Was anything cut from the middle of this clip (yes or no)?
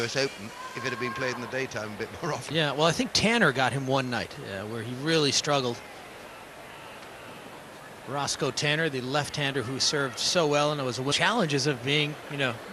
no